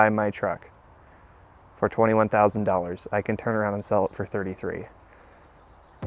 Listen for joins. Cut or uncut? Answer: uncut